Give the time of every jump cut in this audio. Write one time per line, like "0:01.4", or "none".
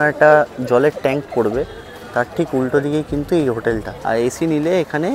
0:03.9